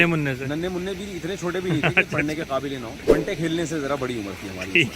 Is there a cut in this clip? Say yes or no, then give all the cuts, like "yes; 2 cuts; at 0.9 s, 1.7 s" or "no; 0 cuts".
yes; 1 cut; at 3.0 s